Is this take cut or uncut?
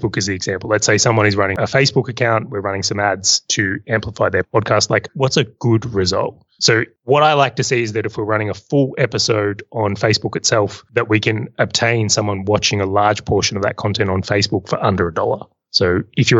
cut